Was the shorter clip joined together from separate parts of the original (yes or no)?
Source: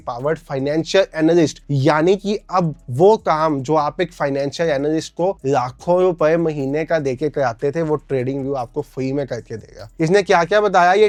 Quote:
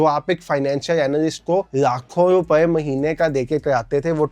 no